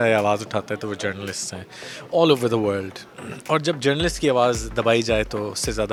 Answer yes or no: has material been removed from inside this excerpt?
no